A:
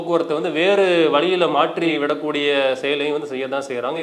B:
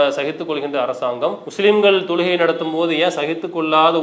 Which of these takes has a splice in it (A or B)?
B